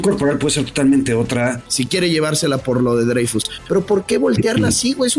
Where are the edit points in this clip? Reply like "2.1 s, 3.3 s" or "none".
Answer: 1.7 s